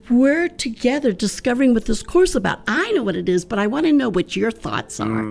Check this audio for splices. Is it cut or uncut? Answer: uncut